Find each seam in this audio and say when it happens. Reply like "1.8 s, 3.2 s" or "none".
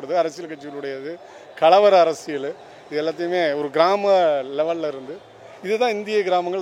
none